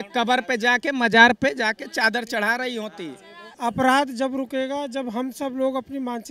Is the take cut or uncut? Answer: cut